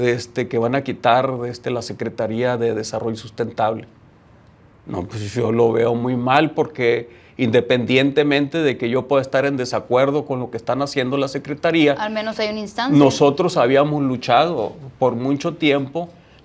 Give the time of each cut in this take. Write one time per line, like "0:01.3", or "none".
none